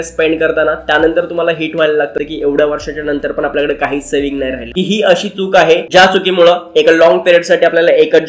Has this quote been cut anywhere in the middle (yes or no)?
yes